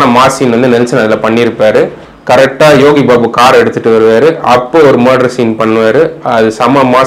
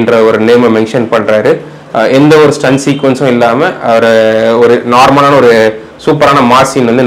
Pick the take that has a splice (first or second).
first